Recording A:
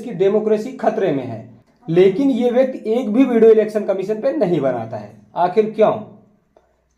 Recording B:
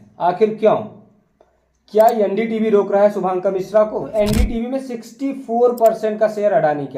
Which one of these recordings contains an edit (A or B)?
B